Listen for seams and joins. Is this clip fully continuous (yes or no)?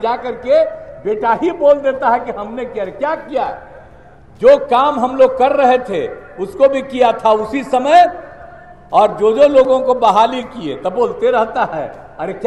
yes